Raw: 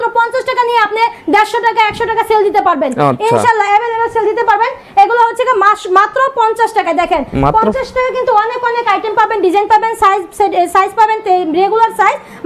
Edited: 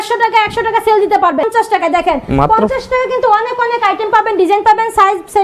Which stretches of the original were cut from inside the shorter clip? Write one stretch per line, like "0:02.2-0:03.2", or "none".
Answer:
0:02.9-0:06.5